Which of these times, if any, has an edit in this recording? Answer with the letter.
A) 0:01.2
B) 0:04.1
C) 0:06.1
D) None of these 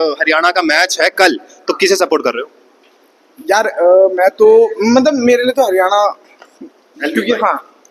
D